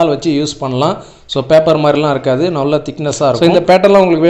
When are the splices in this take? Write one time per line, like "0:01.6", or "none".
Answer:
0:03.0